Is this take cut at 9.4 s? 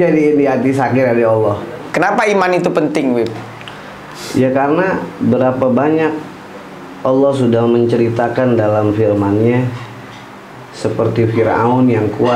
no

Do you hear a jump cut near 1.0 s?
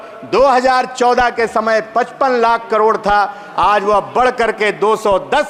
no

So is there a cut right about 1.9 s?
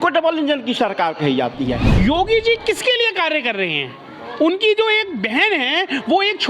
yes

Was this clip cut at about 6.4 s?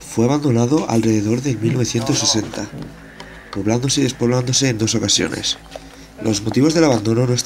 yes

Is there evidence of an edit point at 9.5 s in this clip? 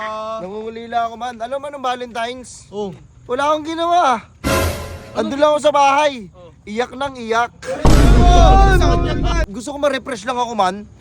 yes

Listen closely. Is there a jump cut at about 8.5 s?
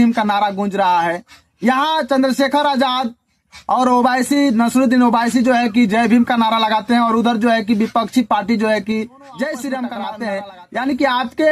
no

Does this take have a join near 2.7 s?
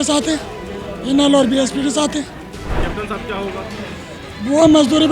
yes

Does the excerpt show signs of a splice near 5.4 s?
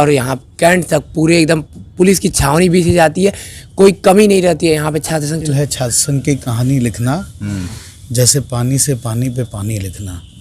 yes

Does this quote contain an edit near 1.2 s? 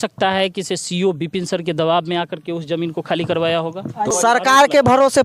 no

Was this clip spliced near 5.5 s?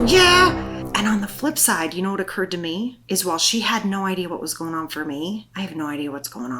yes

